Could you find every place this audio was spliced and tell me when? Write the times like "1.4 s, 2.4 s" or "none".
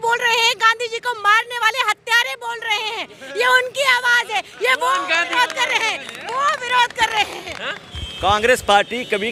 none